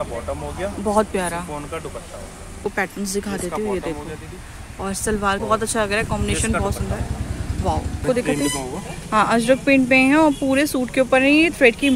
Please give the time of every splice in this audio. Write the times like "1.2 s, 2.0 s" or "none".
2.6 s, 5.4 s, 8.0 s

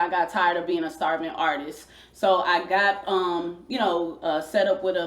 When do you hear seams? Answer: none

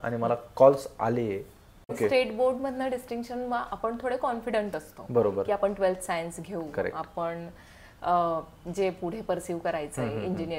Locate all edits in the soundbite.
2.0 s

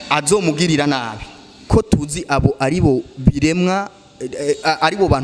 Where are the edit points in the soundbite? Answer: 1.6 s

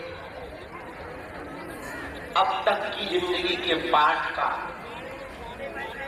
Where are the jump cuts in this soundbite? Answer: none

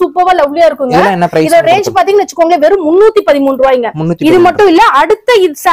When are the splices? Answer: none

